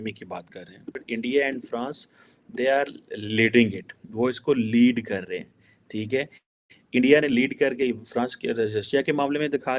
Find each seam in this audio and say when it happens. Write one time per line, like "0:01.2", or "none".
0:01.0